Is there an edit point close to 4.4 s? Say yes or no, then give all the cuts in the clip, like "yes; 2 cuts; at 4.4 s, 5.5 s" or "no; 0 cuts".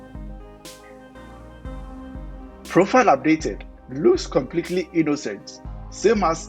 no; 1 cut; at 2.7 s